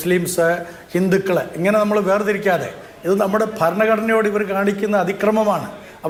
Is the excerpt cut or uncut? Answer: uncut